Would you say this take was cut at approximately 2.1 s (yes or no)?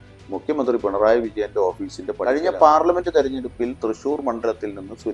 yes